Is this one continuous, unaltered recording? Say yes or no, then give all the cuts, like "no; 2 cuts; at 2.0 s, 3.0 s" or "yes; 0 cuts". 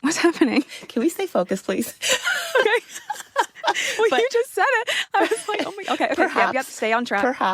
yes; 0 cuts